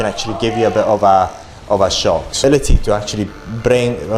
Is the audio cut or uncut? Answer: cut